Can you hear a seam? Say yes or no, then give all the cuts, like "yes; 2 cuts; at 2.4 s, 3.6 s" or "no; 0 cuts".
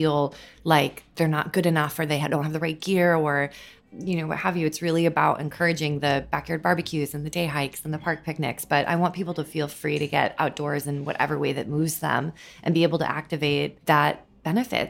yes; 1 cut; at 13.8 s